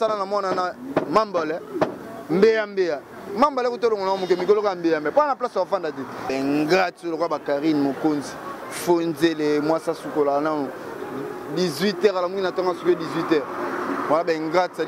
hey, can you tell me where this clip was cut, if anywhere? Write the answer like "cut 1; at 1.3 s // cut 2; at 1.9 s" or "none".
cut 1; at 6.3 s